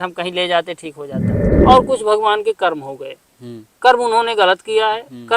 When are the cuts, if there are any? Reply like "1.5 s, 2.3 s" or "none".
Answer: 1.3 s

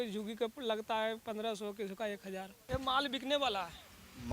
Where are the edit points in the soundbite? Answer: 2.6 s

